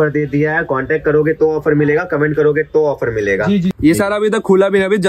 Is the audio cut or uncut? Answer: cut